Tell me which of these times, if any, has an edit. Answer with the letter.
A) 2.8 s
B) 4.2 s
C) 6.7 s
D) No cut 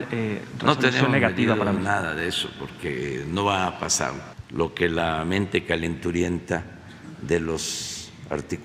D